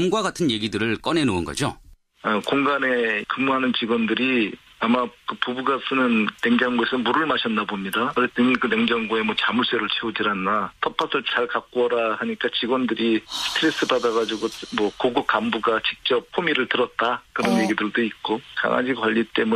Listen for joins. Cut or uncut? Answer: uncut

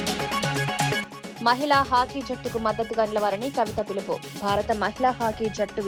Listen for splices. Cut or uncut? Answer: uncut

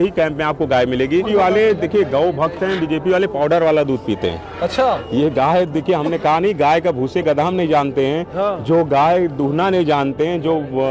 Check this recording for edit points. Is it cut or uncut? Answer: cut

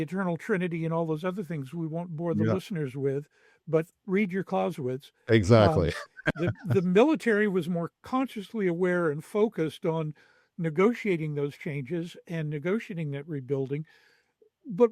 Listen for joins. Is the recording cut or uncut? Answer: uncut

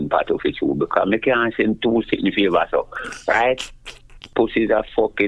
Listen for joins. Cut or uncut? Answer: cut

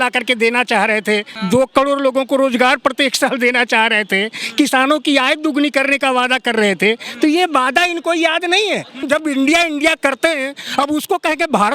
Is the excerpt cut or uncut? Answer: cut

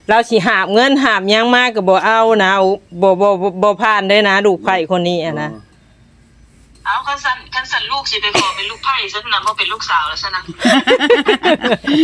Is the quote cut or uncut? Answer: uncut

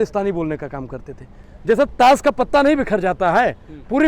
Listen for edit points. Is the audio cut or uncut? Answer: cut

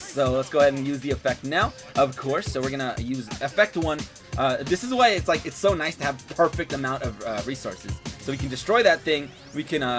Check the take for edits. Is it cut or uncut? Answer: cut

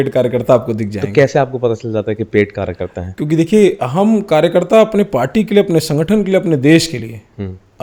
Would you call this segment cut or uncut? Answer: uncut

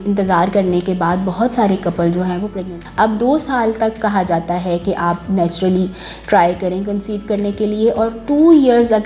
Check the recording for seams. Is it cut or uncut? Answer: cut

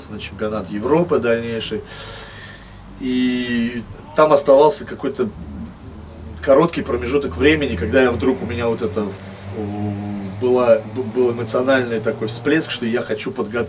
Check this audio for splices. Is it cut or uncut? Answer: uncut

